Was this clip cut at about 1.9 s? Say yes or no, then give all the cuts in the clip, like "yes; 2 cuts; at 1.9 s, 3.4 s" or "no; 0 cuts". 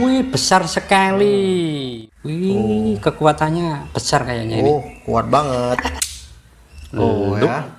yes; 2 cuts; at 1.9 s, 6.1 s